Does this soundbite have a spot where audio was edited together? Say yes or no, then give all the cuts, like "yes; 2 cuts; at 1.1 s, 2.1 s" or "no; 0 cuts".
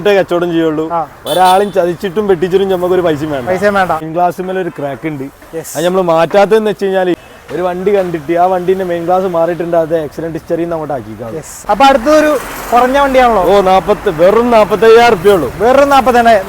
yes; 3 cuts; at 4.0 s, 7.2 s, 11.5 s